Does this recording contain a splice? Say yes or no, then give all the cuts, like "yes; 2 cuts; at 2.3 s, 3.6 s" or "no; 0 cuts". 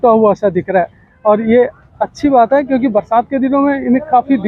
no; 0 cuts